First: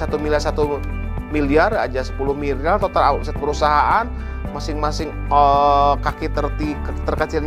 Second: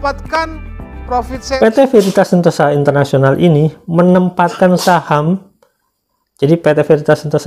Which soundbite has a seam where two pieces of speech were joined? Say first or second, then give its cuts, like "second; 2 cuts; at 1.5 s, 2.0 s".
second; 1 cut; at 1.6 s